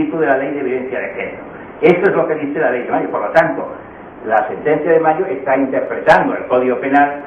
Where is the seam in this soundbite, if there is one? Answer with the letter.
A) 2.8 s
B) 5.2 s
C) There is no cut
A